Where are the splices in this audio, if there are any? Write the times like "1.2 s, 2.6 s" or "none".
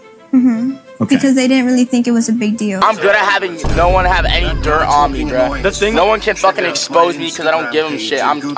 none